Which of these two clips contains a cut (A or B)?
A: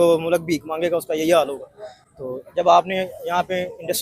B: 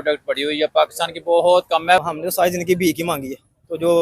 B